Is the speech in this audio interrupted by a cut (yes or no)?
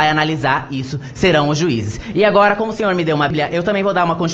no